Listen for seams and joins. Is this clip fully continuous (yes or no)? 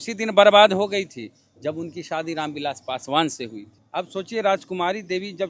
no